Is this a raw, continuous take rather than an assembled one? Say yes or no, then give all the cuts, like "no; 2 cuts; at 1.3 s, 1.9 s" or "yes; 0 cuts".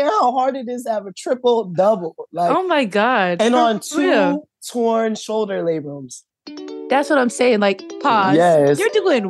no; 2 cuts; at 6.6 s, 7.9 s